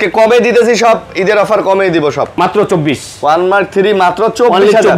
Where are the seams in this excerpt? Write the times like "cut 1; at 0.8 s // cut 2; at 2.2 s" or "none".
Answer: cut 1; at 2.4 s